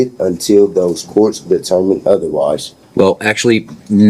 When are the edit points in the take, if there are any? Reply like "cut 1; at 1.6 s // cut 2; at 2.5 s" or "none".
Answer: cut 1; at 2.8 s

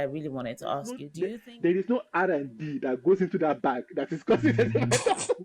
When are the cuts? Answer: cut 1; at 1.1 s

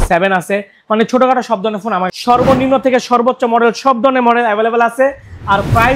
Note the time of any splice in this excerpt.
cut 1; at 2.1 s

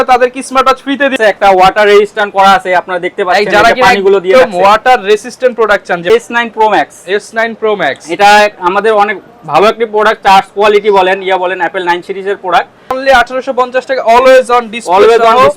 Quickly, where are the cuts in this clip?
cut 1; at 1.1 s // cut 2; at 6.1 s // cut 3; at 13.0 s

